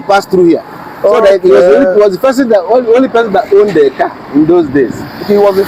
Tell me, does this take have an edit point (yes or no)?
no